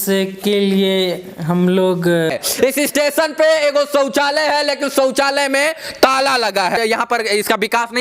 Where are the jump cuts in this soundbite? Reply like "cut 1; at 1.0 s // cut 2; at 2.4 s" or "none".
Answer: cut 1; at 2.3 s // cut 2; at 6.8 s